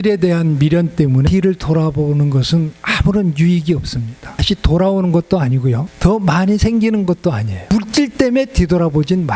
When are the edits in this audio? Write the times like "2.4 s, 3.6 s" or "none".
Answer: 1.3 s, 4.4 s, 5.9 s, 7.7 s

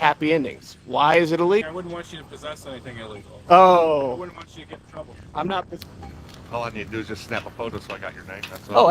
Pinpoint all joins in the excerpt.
1.6 s, 5.8 s

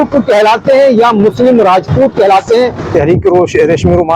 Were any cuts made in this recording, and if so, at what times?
2.9 s

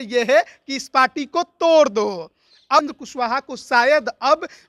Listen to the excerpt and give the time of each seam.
3.0 s

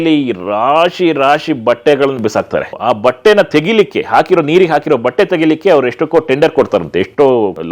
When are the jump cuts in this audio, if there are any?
none

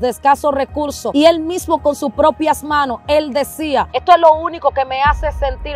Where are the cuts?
1.0 s, 3.9 s

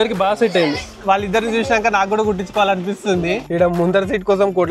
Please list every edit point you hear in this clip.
3.4 s

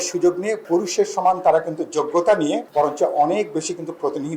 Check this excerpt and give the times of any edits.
none

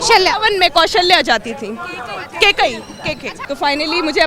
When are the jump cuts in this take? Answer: 3.3 s

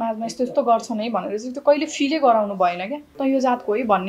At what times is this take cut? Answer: 3.0 s

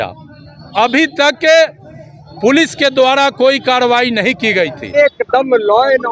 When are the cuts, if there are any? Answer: 5.0 s

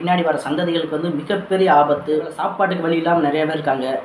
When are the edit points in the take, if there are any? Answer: 2.4 s

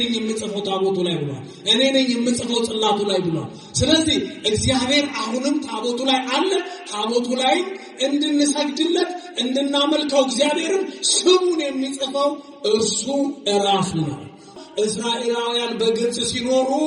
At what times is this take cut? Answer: 14.6 s

